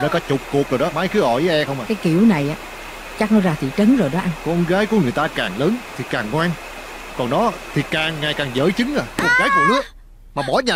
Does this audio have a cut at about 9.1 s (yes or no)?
yes